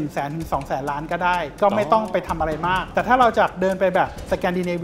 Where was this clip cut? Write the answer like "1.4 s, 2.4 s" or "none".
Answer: 2.9 s